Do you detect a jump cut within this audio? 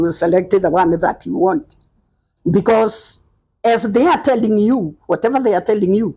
no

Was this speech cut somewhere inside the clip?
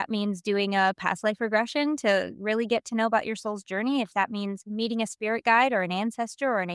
no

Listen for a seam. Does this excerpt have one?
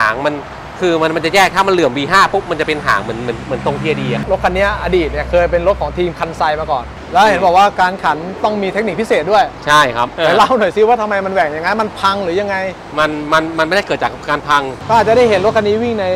yes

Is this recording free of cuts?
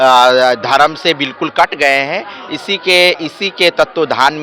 yes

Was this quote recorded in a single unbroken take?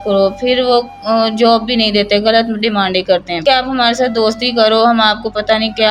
no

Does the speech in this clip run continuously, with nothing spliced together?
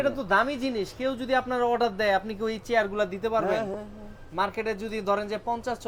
yes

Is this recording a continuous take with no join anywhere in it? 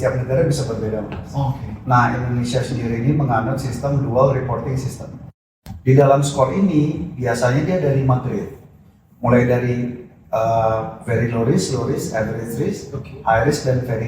no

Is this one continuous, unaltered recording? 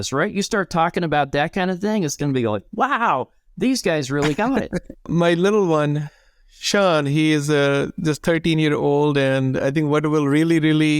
no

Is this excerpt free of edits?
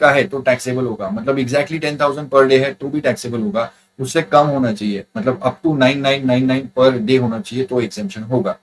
yes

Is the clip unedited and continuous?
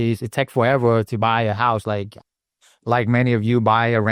yes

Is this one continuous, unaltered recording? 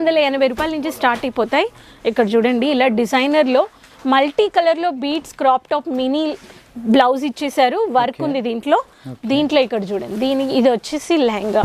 yes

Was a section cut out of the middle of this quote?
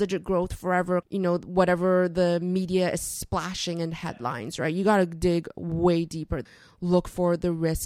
yes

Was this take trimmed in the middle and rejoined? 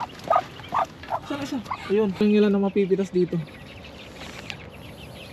yes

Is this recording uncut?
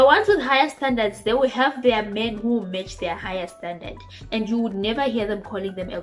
yes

